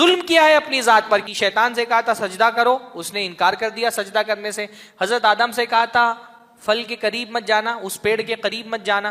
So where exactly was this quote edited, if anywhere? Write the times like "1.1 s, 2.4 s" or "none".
1.3 s